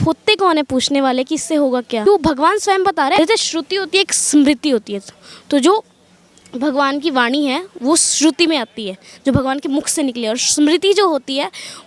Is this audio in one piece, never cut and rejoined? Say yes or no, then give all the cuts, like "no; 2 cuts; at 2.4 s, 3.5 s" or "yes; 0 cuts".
no; 2 cuts; at 2.0 s, 3.2 s